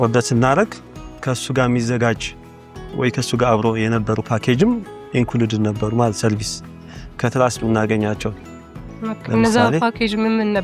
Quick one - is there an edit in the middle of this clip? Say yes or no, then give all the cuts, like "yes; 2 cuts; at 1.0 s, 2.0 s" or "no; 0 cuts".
no; 0 cuts